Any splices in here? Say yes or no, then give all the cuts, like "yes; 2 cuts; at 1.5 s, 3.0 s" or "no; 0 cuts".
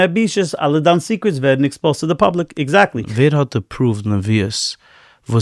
yes; 1 cut; at 3.0 s